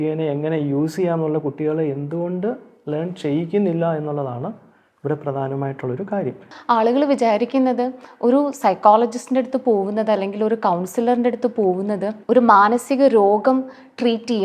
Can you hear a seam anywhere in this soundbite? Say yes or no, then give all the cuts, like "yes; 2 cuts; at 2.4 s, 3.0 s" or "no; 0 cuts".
yes; 1 cut; at 6.5 s